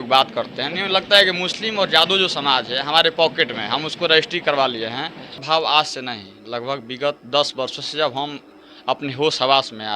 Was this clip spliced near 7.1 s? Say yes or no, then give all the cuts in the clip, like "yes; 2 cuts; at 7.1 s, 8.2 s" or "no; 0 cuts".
no; 1 cut; at 5.4 s